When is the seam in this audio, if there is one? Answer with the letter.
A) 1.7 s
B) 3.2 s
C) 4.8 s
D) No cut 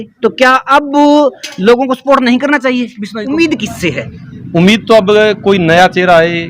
B